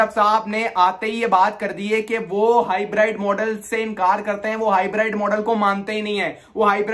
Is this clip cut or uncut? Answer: uncut